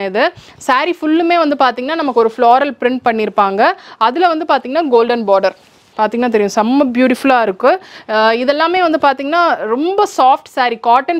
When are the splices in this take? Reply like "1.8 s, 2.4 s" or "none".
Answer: none

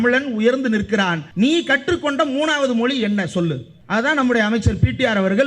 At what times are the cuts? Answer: 1.2 s, 3.7 s

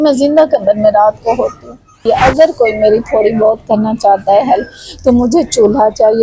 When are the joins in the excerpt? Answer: 2.0 s

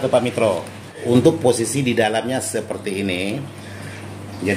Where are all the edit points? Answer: 1.0 s

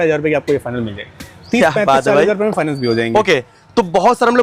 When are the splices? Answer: none

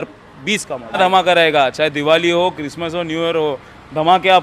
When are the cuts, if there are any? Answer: 1.0 s

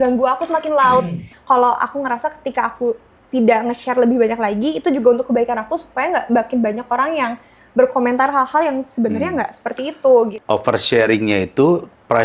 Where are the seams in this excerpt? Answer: 1.3 s, 10.4 s

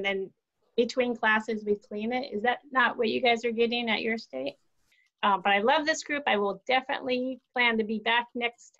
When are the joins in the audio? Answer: 5.0 s

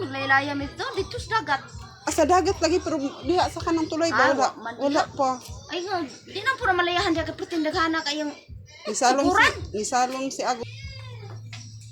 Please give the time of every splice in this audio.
10.7 s

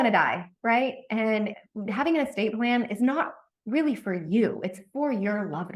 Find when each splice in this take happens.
1.7 s

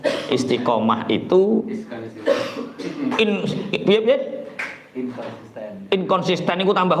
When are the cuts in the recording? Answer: none

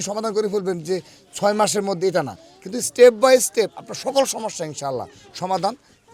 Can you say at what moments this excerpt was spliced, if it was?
none

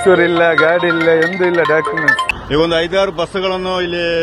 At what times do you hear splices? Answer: 2.4 s

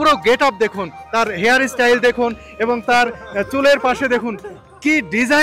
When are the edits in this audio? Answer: none

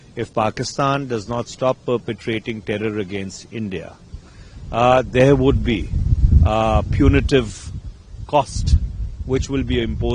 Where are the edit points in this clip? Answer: none

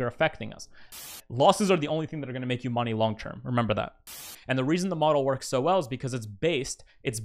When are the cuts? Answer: 1.0 s, 4.1 s

